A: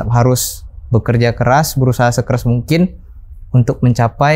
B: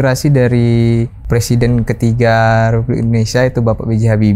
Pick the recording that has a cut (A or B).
B